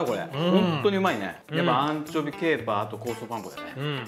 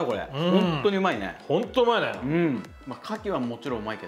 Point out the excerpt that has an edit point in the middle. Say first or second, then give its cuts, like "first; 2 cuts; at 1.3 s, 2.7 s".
first; 1 cut; at 1.4 s